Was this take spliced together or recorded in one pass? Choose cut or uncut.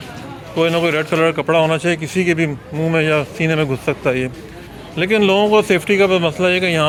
uncut